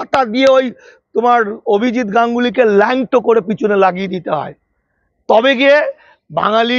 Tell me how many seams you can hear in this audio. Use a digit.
0